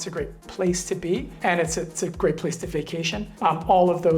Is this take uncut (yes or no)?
no